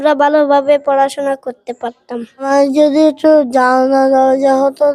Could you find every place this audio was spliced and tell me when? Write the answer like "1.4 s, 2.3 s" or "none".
2.3 s